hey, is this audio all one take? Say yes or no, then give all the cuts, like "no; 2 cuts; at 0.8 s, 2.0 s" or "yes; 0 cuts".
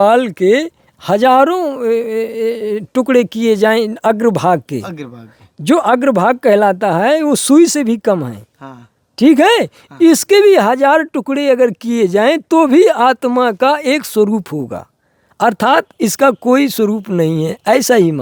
yes; 0 cuts